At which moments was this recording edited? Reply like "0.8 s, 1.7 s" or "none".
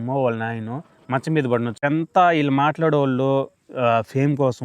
1.8 s